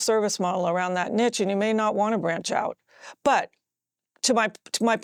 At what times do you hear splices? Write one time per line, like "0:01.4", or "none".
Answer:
none